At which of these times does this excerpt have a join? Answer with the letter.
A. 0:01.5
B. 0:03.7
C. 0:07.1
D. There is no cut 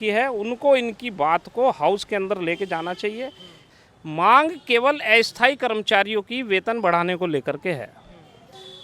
B